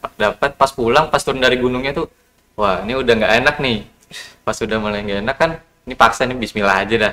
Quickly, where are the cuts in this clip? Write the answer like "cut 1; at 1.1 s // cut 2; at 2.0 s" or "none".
none